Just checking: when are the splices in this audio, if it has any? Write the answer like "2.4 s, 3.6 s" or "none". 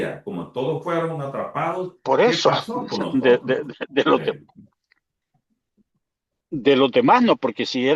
none